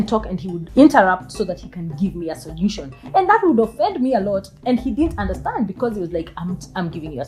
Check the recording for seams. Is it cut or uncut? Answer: uncut